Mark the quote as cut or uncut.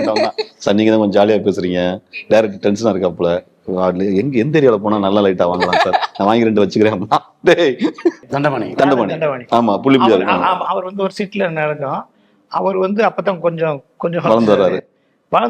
cut